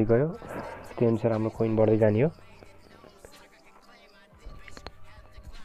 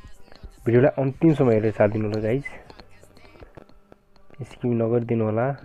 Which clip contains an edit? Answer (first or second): first